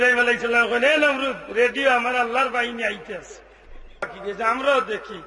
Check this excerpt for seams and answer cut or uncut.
cut